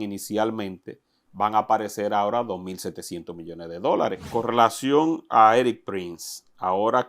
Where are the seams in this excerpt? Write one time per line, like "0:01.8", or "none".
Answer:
0:04.2